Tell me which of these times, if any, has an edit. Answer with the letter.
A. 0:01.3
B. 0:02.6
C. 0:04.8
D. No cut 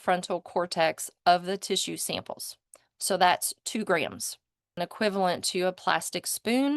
C